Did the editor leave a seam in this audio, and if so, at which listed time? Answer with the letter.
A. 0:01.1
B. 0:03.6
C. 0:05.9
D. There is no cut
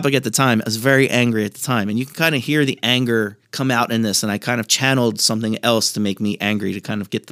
D